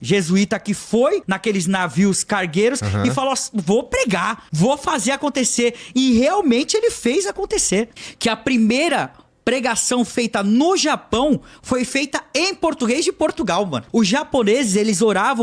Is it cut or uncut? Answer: cut